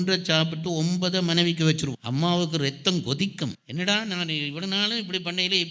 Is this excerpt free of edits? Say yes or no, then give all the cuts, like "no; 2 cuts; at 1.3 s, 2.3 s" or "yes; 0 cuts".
yes; 0 cuts